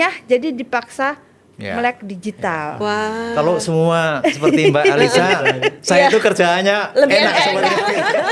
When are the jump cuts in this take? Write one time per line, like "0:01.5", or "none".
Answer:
none